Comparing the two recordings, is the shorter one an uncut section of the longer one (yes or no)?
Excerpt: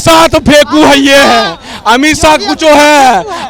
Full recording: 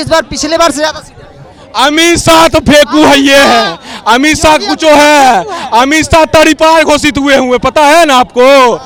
yes